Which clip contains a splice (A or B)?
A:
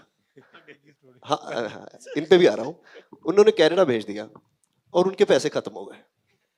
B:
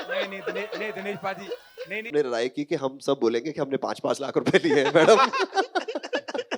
B